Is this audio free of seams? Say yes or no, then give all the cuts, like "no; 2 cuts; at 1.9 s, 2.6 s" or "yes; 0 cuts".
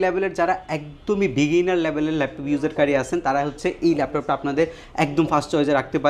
yes; 0 cuts